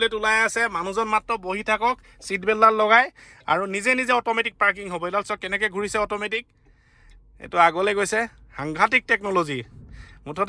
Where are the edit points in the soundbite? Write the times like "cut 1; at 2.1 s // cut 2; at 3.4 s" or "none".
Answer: none